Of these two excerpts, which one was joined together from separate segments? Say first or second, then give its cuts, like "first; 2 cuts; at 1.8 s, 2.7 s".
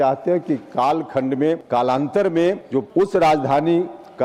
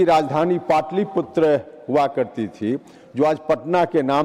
first; 2 cuts; at 1.6 s, 2.7 s